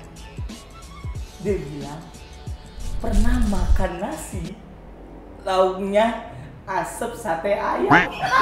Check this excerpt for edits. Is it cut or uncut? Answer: uncut